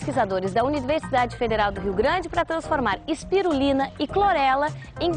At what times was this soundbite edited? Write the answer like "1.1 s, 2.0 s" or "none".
none